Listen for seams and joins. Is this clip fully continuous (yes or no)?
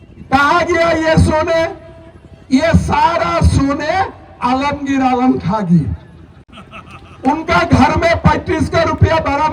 yes